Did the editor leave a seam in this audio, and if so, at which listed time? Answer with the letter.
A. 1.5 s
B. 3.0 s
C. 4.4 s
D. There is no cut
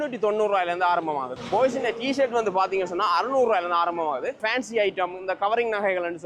C